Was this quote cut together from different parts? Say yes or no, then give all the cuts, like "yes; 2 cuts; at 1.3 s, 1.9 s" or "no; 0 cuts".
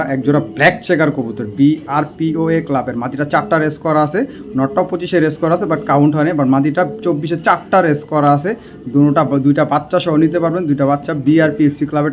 no; 0 cuts